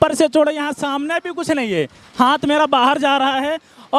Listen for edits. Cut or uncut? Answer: uncut